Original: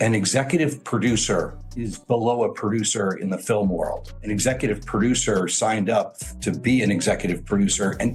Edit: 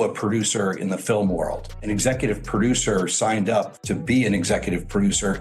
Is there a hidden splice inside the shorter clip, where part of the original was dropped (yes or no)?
yes